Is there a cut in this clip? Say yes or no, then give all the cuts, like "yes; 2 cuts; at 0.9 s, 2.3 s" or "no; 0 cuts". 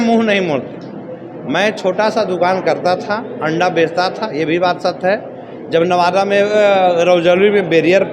no; 0 cuts